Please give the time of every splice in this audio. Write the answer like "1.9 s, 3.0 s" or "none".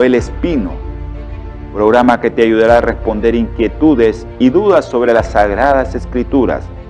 none